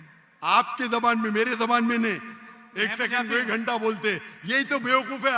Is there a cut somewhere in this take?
no; 0 cuts

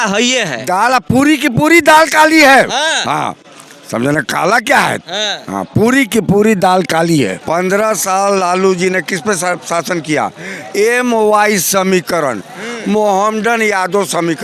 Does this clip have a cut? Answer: yes; 1 cut; at 7.4 s

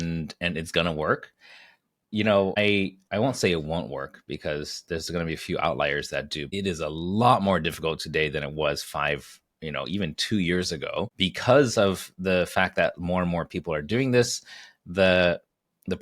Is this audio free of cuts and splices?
no; 3 cuts; at 2.6 s, 6.5 s, 11.1 s

